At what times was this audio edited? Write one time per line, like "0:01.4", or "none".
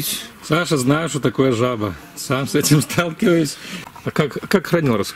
0:03.8